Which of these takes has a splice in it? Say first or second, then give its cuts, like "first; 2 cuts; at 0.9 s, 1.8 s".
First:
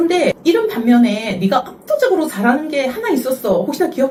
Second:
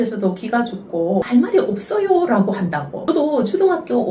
second; 2 cuts; at 1.3 s, 3.0 s